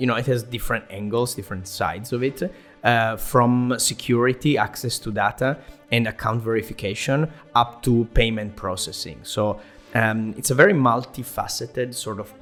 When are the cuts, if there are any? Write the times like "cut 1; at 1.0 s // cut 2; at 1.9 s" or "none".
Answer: none